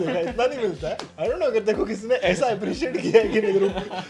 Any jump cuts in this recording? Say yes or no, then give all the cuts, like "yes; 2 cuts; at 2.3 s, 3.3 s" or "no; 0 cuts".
yes; 1 cut; at 1.1 s